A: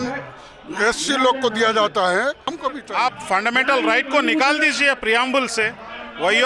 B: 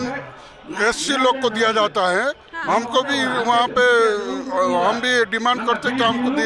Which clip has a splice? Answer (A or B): A